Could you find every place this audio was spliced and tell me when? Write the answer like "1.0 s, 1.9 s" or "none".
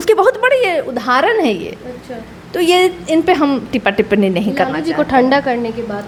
none